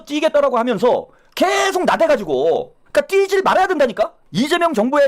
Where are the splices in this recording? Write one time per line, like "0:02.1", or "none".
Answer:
0:02.8
0:04.2